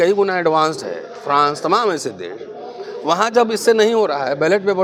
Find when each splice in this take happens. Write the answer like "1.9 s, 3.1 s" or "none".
none